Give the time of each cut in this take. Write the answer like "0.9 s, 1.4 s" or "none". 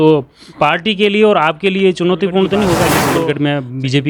3.1 s